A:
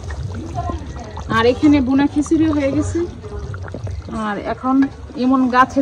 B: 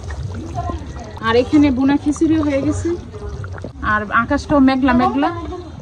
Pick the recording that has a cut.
B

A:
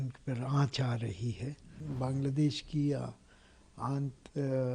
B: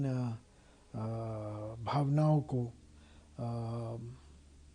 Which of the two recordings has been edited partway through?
A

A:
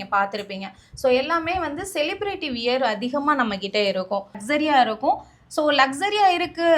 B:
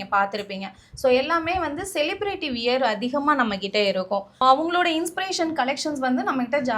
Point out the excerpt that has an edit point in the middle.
A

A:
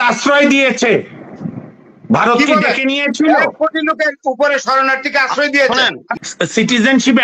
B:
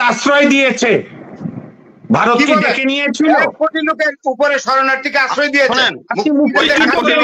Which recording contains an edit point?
A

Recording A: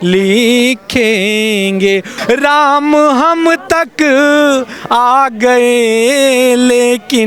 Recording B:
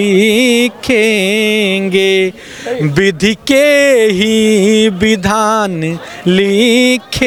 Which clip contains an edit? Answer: A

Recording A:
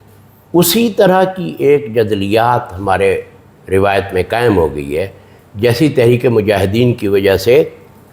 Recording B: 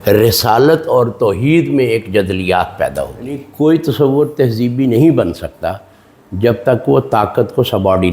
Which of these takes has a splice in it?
B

